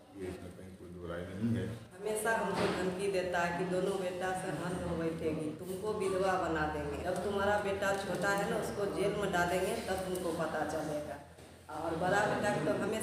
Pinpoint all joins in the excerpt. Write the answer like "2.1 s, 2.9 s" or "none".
2.0 s, 7.0 s